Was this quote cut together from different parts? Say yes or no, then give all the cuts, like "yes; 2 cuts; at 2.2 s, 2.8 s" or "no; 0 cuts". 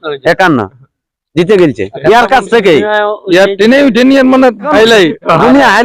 yes; 1 cut; at 4.7 s